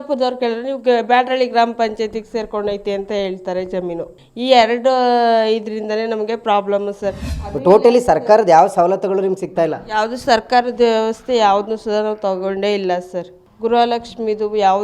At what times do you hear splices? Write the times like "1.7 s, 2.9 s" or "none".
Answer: 7.3 s